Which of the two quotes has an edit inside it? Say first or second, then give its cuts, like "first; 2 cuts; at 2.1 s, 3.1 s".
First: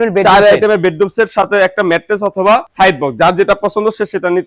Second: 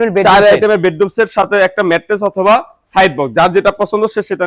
first; 1 cut; at 2.7 s